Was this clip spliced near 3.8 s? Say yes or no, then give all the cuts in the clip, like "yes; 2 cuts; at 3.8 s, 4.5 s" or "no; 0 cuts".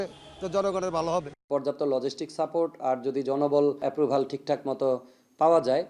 yes; 2 cuts; at 1.4 s, 3.8 s